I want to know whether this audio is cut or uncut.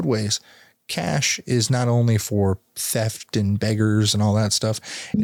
uncut